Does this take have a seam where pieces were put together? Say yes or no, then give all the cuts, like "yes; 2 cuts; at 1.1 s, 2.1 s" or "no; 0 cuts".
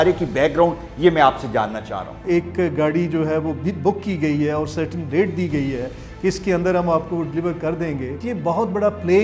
yes; 2 cuts; at 2.2 s, 8.2 s